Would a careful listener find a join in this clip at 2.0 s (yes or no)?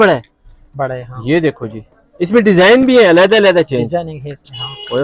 no